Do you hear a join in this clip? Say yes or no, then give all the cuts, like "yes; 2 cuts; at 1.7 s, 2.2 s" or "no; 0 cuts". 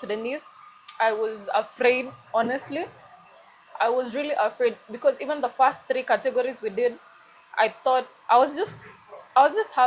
no; 0 cuts